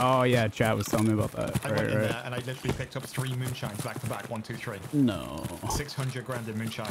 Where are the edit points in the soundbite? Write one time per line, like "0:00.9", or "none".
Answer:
none